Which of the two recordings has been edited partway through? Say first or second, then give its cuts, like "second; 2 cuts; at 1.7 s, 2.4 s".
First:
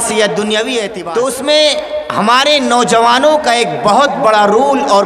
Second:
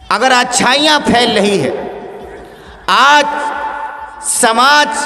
first; 1 cut; at 1.0 s